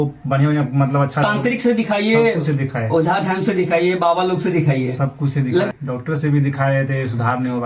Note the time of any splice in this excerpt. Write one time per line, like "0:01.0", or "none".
0:05.7